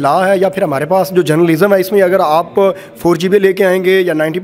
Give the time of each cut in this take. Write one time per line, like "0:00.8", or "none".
none